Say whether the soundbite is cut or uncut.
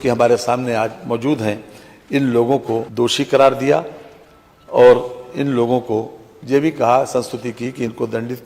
uncut